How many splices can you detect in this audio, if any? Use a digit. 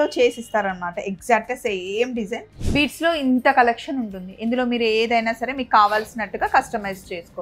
1